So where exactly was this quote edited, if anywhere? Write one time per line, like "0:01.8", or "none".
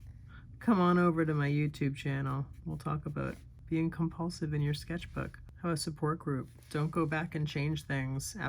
0:03.5
0:05.4

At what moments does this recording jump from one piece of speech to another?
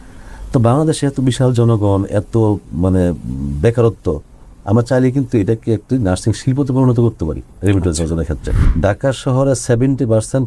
0:08.5

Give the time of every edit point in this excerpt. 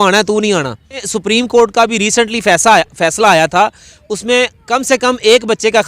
0:01.1

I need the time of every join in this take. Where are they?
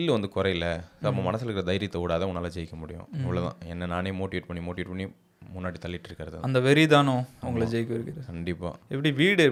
none

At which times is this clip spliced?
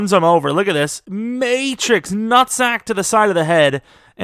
0:01.0

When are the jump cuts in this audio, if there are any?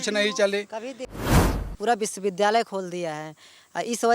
0:01.3

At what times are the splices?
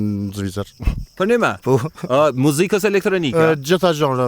none

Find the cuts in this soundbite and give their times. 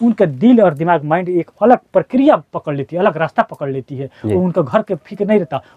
none

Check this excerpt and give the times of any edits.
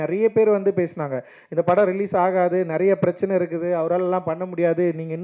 none

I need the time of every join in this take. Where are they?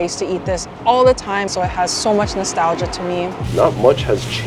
0:01.5
0:03.4

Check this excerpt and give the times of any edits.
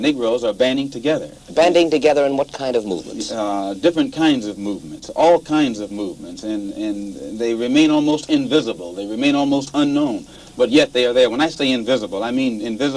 0:05.9

